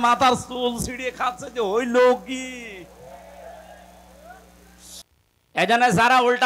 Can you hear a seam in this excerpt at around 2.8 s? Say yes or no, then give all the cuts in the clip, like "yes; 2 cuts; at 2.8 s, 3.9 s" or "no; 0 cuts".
no; 1 cut; at 5.0 s